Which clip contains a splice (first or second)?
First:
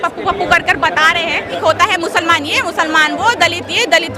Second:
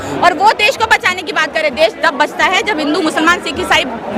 first